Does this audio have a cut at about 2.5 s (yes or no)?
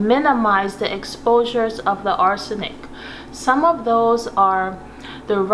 no